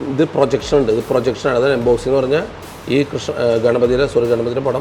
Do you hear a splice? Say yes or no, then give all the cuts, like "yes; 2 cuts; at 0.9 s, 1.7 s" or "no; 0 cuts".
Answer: no; 0 cuts